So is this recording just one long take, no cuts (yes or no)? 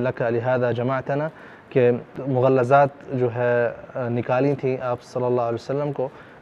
yes